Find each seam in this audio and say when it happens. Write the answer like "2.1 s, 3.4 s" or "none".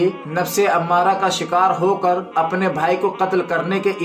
none